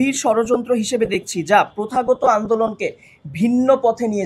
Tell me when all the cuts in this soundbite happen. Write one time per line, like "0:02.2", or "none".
none